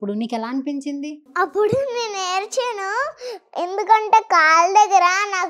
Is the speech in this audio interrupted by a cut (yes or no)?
yes